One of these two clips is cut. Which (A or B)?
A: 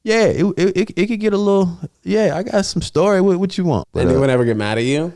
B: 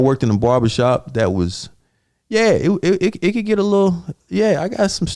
A